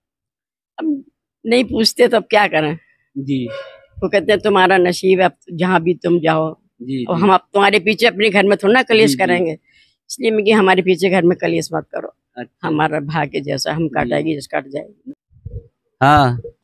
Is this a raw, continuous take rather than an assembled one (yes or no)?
no